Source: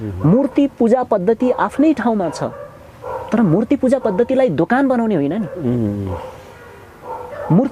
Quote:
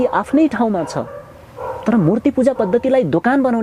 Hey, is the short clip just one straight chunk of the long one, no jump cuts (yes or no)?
yes